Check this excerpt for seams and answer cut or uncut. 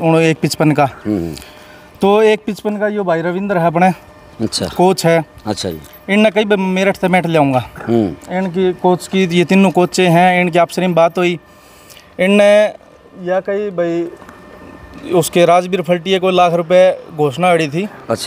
uncut